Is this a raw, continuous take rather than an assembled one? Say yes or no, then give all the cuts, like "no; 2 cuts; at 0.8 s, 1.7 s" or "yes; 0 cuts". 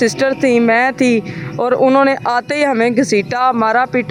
yes; 0 cuts